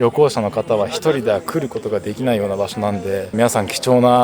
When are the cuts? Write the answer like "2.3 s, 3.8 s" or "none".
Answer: 3.3 s